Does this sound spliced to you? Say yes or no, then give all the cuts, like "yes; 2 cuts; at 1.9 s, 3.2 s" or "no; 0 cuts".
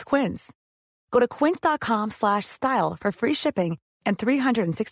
no; 0 cuts